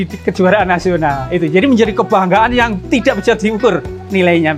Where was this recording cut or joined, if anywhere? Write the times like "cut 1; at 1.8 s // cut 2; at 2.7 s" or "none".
none

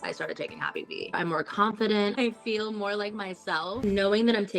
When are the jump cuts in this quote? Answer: cut 1; at 1.1 s // cut 2; at 2.2 s // cut 3; at 3.8 s

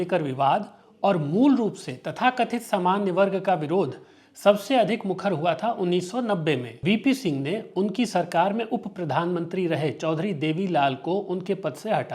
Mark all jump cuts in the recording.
cut 1; at 6.7 s

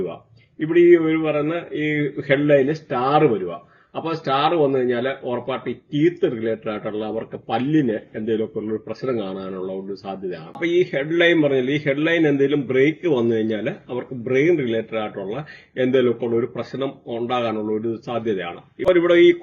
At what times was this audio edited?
none

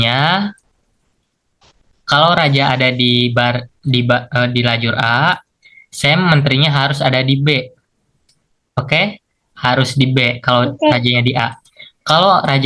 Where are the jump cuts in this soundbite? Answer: none

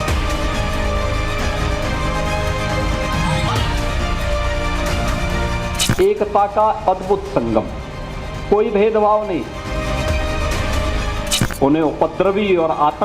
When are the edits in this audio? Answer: cut 1; at 3.5 s

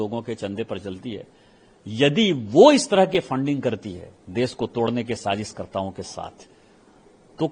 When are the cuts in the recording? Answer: none

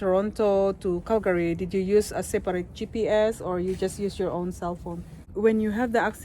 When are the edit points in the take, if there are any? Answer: cut 1; at 5.3 s

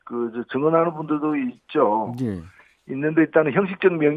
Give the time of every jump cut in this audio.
none

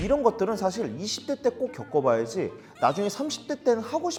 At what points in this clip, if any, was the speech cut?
none

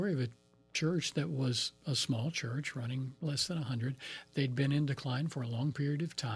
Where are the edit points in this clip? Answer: none

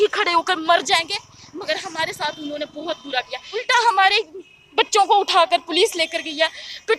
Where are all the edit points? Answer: cut 1; at 3.6 s

